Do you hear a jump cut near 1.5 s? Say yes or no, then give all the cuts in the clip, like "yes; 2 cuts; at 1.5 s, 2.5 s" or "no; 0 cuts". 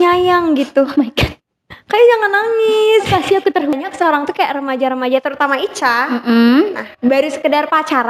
no; 1 cut; at 3.7 s